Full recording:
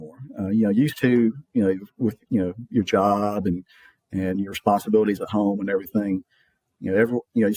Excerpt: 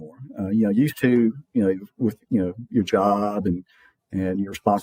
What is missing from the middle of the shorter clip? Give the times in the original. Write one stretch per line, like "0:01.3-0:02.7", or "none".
none